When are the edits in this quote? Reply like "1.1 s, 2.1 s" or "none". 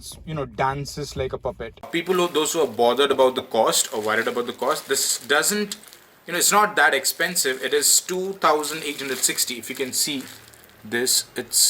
1.9 s